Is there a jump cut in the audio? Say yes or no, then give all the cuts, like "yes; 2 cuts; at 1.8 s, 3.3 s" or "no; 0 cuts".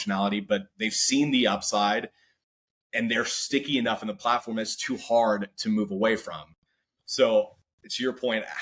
no; 0 cuts